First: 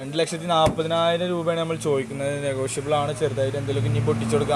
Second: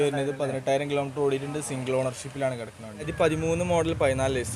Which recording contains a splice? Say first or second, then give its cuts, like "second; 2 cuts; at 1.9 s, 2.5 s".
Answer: second; 1 cut; at 3.1 s